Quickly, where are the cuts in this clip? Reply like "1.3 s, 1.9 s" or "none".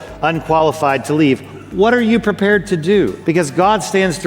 3.2 s